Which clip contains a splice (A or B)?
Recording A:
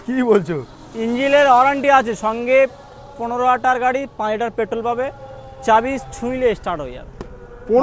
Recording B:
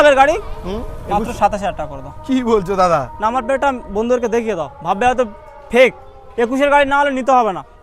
B